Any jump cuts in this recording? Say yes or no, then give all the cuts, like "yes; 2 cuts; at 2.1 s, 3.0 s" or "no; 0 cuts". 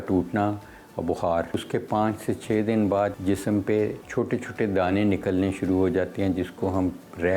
yes; 3 cuts; at 1.6 s, 3.2 s, 4.0 s